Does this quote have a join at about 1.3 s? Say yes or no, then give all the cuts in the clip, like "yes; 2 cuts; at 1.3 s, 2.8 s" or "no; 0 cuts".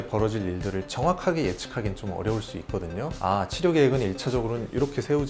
no; 1 cut; at 3.2 s